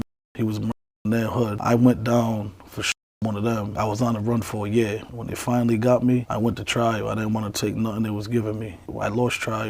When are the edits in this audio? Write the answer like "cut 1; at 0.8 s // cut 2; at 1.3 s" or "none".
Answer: cut 1; at 3.7 s // cut 2; at 5.1 s

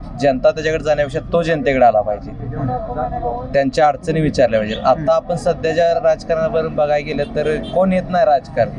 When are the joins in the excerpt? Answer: none

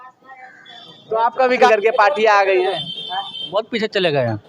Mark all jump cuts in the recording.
cut 1; at 1.7 s

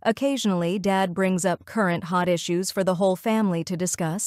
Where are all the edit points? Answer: none

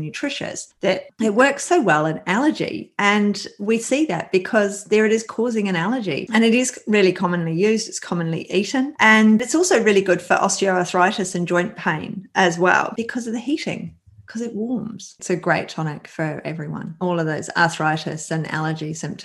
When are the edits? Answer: cut 1; at 1.0 s // cut 2; at 6.2 s // cut 3; at 9.4 s // cut 4; at 15.2 s // cut 5; at 17.0 s

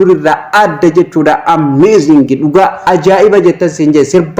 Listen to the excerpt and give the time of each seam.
cut 1; at 2.8 s

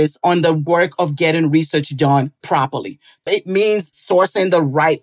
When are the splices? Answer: cut 1; at 3.3 s

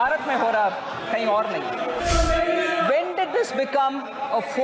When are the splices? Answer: cut 1; at 2.0 s

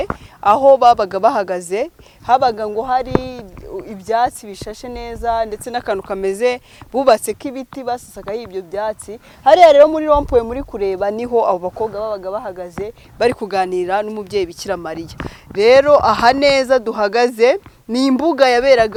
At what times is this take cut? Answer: none

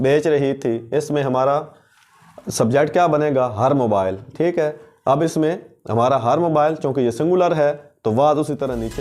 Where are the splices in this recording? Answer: none

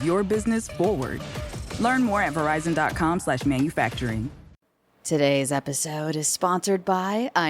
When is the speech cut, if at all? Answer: cut 1; at 4.6 s

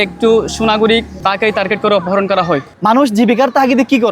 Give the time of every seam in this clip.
cut 1; at 1.1 s // cut 2; at 2.7 s

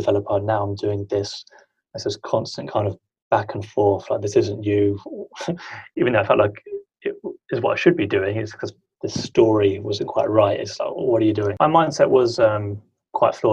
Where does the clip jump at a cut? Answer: cut 1; at 11.5 s

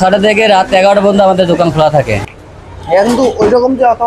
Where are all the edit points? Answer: cut 1; at 2.3 s

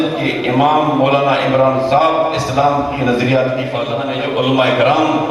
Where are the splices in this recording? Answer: cut 1; at 4.0 s

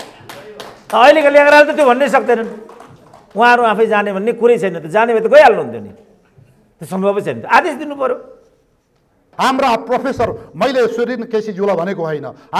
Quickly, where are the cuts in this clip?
cut 1; at 9.3 s

